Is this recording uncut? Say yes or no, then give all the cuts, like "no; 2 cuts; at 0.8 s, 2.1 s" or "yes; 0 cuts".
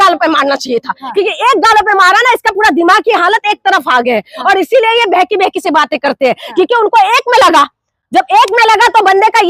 yes; 0 cuts